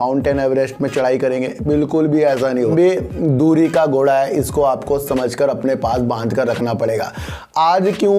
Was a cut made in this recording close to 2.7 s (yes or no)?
yes